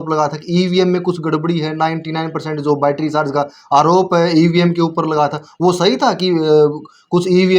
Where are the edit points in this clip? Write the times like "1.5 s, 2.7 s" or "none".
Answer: none

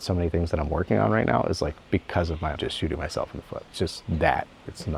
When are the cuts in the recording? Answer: none

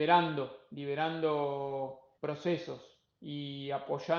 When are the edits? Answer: 2.1 s

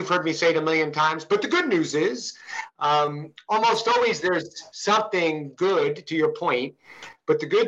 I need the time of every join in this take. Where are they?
none

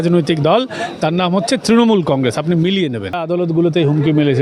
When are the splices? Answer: 3.2 s

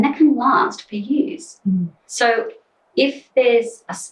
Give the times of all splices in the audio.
2.0 s

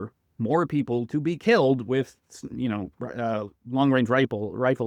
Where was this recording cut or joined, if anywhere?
none

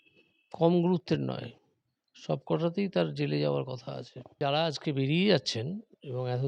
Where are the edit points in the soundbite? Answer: 4.4 s

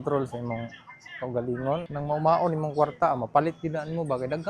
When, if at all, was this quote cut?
1.9 s

